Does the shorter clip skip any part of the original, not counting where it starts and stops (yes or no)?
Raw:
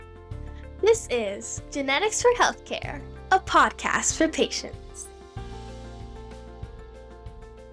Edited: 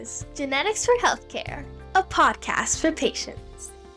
no